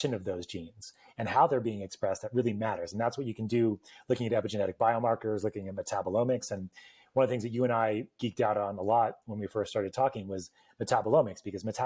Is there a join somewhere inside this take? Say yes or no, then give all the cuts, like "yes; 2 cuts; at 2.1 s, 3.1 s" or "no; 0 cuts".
no; 0 cuts